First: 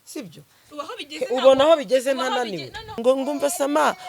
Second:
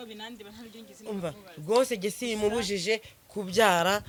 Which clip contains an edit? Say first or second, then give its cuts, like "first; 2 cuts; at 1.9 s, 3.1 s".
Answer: first; 1 cut; at 3.0 s